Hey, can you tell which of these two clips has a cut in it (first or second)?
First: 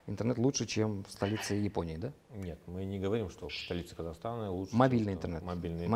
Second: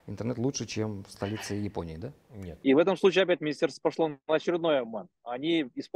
second